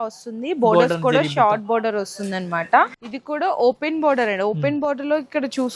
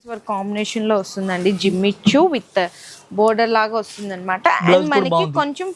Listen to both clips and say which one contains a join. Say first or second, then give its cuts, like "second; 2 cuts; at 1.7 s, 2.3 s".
first; 1 cut; at 3.1 s